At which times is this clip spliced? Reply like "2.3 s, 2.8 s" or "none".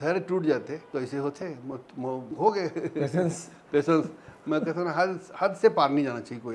0.8 s, 2.3 s